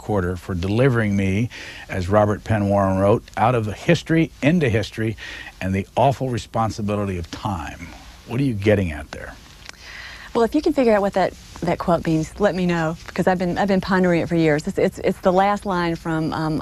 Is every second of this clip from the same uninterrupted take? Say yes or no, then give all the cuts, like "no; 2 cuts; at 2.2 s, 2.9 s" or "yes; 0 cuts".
yes; 0 cuts